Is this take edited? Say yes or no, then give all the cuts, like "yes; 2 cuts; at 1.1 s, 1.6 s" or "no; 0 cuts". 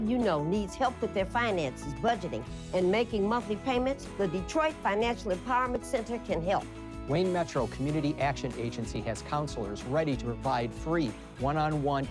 no; 0 cuts